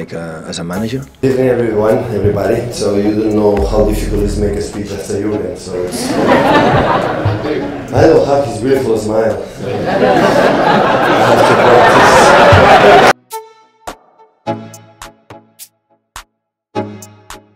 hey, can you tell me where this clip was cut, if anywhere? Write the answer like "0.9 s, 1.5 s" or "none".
1.2 s, 13.1 s